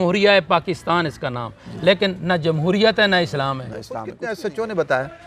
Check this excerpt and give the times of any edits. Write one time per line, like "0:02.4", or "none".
0:04.1